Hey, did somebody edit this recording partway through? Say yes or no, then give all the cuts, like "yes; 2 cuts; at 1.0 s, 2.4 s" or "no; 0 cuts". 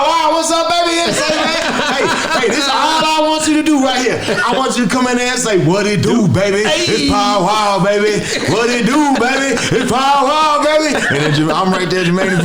no; 0 cuts